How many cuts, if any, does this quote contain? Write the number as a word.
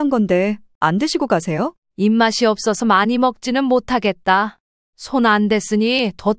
one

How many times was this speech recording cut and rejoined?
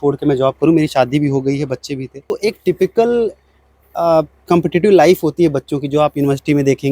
one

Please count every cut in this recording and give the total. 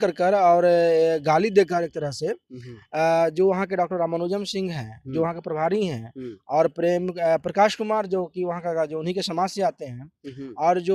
zero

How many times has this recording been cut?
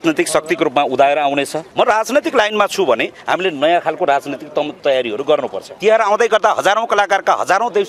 two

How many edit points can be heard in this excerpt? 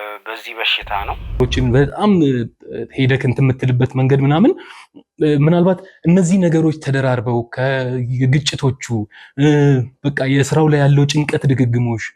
one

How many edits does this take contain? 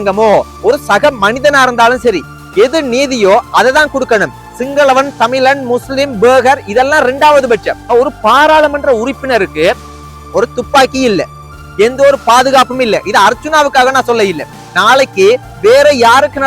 one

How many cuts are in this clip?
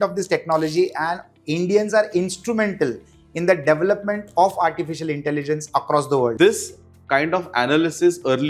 one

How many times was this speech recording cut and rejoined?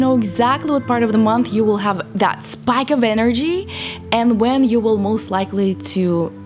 zero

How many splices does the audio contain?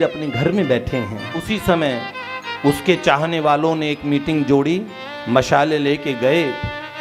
one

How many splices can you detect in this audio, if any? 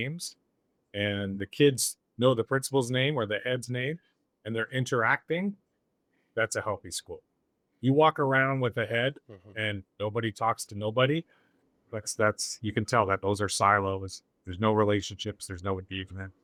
zero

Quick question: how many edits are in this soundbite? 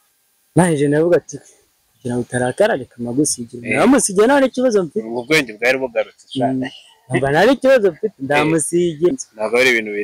one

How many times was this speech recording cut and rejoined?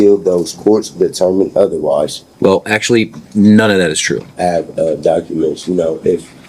two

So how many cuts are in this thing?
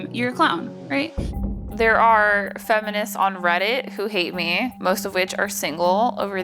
two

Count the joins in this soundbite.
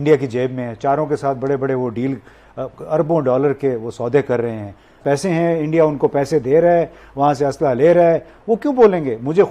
one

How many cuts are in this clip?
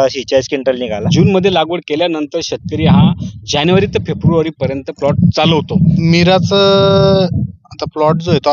two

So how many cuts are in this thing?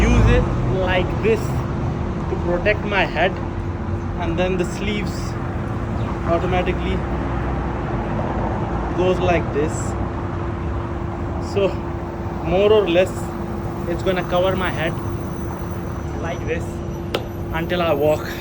zero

